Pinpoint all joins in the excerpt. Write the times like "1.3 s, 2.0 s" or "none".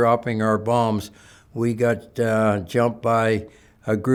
none